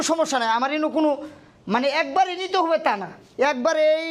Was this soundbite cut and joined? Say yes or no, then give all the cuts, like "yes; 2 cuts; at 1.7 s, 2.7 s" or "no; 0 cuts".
no; 0 cuts